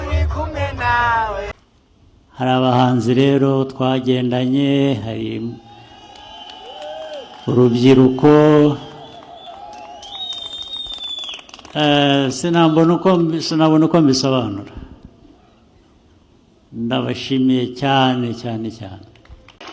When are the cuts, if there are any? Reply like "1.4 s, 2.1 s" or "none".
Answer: 1.5 s